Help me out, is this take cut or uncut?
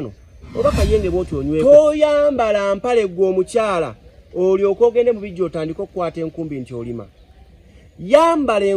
cut